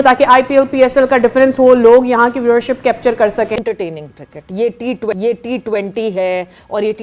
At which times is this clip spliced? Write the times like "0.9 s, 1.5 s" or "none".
3.5 s